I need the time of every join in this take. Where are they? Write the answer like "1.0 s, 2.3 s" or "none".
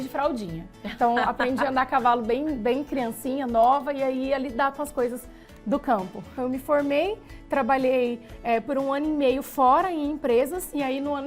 6.3 s